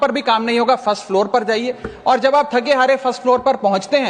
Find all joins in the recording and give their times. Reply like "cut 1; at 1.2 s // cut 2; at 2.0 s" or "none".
none